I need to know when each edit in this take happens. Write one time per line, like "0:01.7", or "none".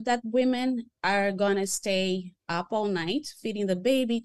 0:00.9
0:02.4